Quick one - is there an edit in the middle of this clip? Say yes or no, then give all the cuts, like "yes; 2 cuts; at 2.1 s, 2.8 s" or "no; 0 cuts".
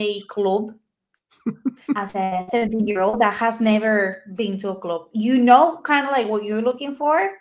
no; 0 cuts